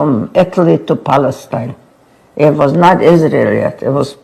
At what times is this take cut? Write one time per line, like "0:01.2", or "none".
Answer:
none